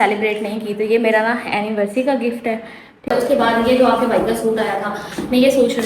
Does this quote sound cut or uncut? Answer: cut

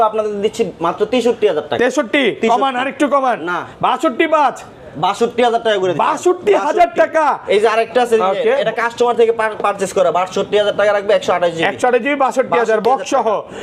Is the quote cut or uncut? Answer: uncut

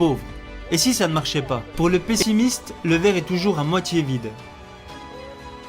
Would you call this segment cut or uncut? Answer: cut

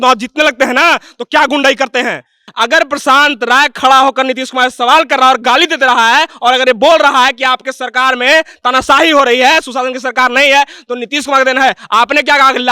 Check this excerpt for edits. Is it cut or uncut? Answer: cut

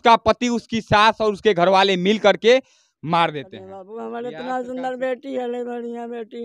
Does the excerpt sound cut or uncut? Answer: cut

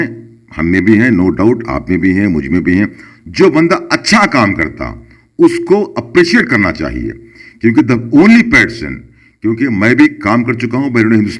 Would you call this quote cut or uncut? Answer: uncut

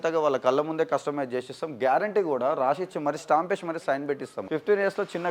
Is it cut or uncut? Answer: cut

